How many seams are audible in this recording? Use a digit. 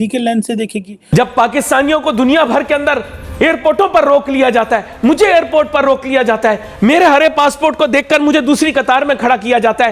1